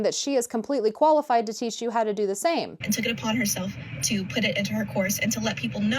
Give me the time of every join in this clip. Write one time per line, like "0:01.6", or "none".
0:02.7